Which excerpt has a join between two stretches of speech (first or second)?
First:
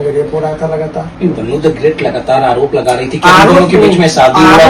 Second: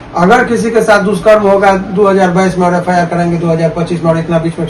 first